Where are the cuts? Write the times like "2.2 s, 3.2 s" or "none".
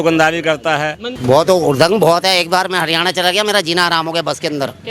1.1 s